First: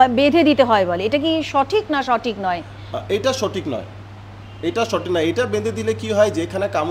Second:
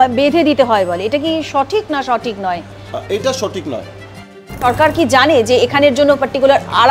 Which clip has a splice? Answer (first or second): second